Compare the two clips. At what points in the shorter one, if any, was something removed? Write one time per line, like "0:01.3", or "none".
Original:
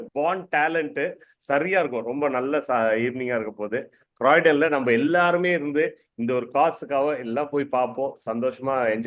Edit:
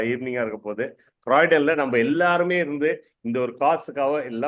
none

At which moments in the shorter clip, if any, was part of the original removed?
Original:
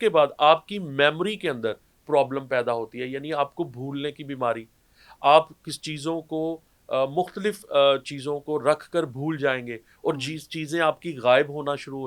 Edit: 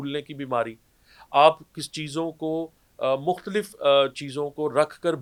none

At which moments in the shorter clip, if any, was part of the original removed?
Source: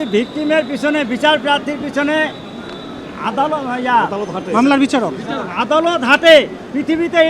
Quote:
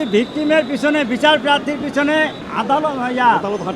0:02.4

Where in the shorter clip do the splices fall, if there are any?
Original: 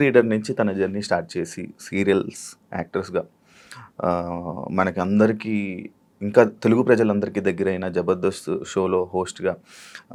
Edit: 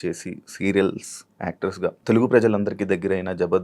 0:02.0

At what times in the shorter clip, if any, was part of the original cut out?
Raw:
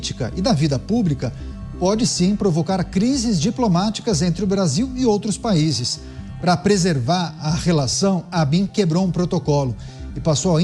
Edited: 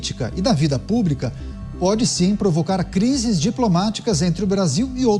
none

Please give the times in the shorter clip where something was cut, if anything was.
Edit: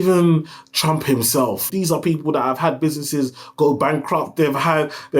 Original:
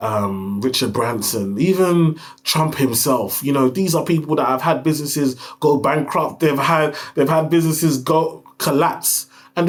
0:01.7

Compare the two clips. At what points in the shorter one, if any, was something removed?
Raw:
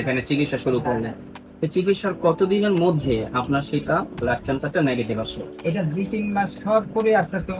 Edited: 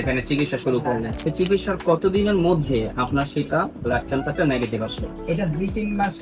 0:01.1

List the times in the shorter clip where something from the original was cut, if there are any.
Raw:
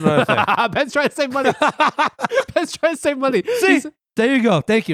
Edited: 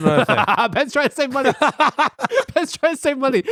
none

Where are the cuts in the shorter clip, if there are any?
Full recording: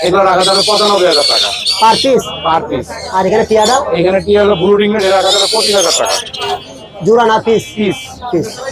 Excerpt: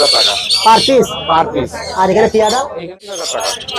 0:02.8

